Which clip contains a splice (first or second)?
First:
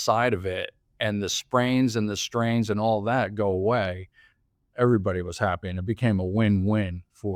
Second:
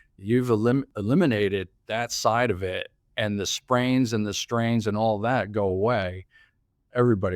second